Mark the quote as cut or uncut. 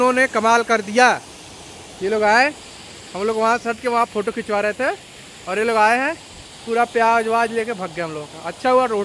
uncut